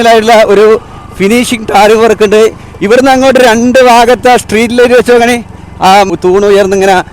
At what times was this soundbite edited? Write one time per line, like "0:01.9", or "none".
0:06.1

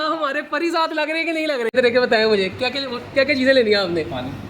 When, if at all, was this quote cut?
0:01.7

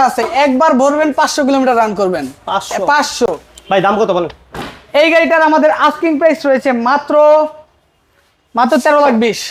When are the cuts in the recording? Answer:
none

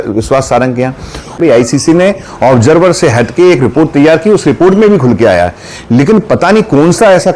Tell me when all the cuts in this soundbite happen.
none

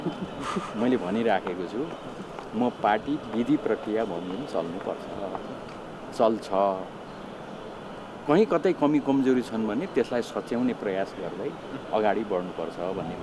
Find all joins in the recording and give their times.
none

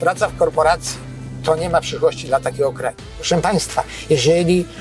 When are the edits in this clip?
0:03.1

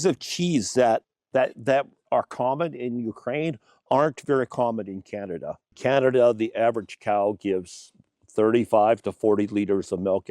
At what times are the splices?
0:01.2
0:05.7

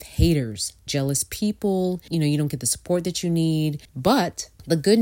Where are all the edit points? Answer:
0:00.9
0:02.0
0:03.9

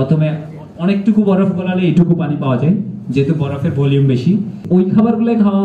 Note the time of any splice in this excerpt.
0:04.6

